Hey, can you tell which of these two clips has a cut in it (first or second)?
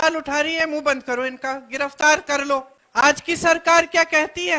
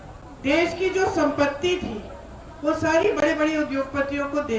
first